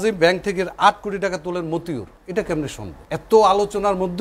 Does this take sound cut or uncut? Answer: cut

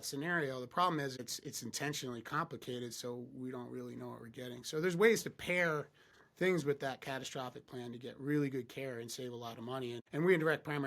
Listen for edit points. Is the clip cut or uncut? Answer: cut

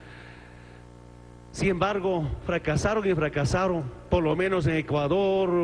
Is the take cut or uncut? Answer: uncut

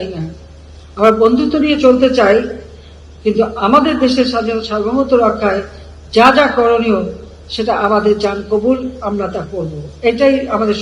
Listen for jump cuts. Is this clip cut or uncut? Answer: uncut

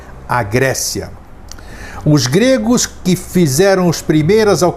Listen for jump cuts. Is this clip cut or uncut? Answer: cut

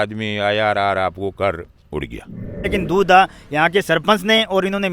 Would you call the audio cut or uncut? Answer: cut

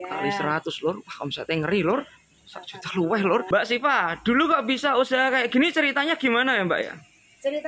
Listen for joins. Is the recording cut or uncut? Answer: cut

